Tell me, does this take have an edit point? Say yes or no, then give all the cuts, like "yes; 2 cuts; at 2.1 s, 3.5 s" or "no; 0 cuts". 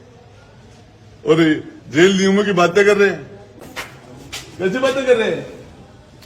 yes; 1 cut; at 3.7 s